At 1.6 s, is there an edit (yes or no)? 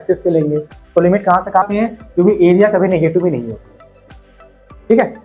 yes